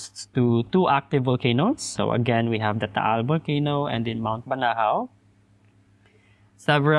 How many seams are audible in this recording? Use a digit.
0